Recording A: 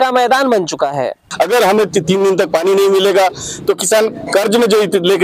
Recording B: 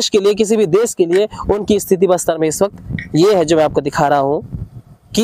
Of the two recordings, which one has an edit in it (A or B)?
A